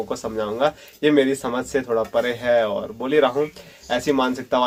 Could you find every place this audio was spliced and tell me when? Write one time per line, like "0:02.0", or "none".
none

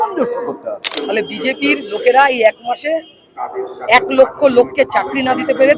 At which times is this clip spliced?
0:00.9

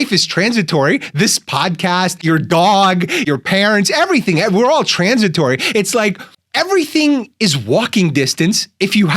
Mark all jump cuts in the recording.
0:02.2
0:03.3

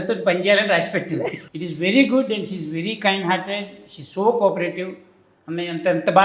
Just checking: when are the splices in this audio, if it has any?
0:01.4

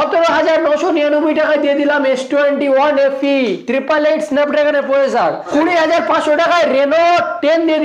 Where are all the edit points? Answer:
0:05.4

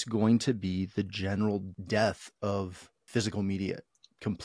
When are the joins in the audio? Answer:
0:01.7
0:03.1

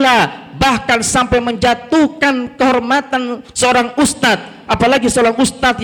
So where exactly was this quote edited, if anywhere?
none

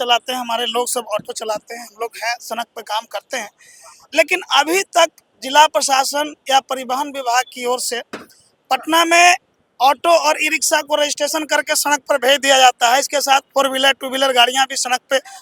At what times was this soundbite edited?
none

